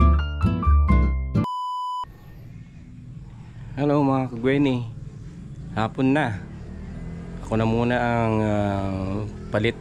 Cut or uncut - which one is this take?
cut